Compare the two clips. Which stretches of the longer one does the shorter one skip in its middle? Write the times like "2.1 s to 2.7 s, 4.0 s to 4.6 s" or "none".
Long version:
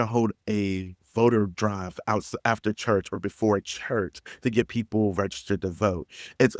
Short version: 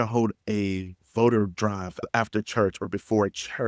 2.0 s to 2.3 s